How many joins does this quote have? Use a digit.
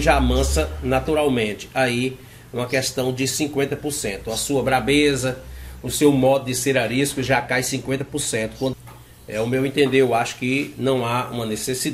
1